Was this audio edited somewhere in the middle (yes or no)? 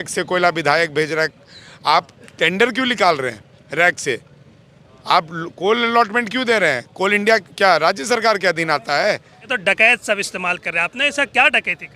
yes